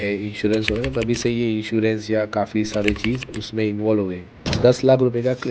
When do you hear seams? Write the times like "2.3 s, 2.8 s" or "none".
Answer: 4.4 s